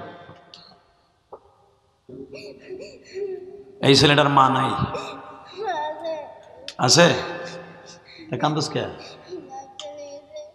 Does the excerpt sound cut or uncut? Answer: cut